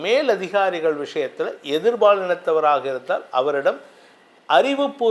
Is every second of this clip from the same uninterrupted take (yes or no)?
yes